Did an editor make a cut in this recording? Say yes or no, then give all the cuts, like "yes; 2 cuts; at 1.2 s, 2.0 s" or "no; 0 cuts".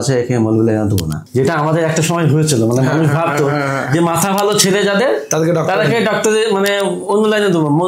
yes; 1 cut; at 1.2 s